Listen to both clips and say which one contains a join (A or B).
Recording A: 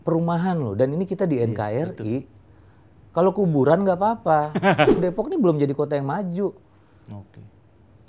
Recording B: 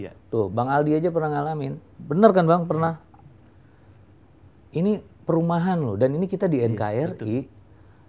A